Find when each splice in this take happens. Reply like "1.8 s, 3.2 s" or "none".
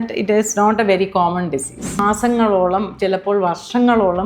2.0 s